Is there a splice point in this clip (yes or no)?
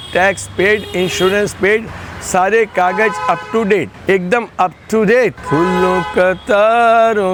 no